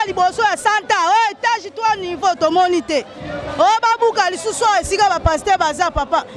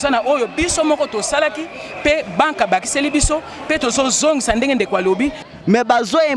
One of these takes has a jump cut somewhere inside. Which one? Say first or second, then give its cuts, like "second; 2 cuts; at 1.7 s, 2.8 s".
second; 1 cut; at 5.4 s